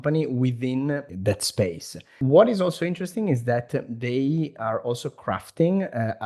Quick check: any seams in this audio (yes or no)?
yes